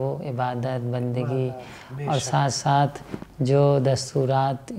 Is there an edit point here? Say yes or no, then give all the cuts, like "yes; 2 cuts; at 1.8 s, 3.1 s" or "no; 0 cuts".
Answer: no; 0 cuts